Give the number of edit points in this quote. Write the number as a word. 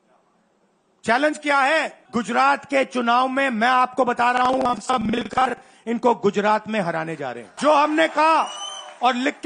two